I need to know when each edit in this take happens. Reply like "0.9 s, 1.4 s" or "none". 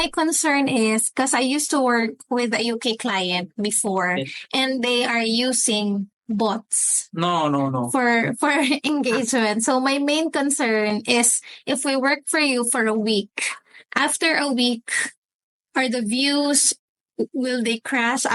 none